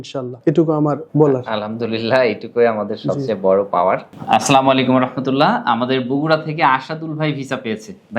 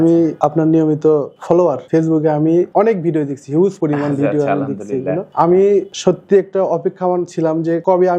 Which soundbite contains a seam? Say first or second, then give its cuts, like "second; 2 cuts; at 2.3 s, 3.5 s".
first; 1 cut; at 4.1 s